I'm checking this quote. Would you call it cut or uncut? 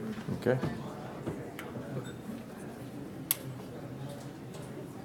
cut